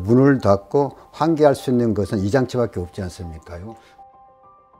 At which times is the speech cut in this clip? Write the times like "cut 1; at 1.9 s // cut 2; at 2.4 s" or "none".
cut 1; at 3.4 s